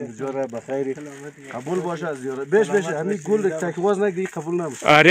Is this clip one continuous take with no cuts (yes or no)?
yes